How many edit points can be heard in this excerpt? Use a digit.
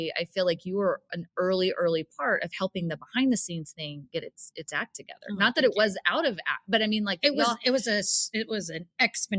0